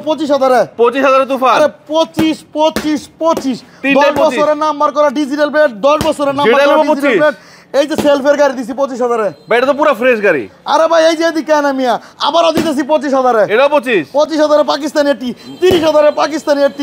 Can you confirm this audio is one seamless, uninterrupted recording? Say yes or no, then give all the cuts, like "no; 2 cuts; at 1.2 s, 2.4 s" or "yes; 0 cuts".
yes; 0 cuts